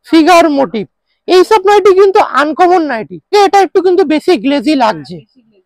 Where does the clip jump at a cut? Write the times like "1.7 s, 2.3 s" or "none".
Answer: 3.3 s